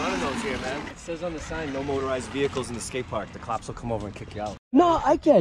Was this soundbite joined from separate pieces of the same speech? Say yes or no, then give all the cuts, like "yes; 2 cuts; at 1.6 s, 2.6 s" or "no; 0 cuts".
yes; 2 cuts; at 1.0 s, 4.5 s